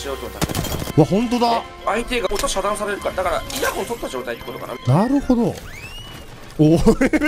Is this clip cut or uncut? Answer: cut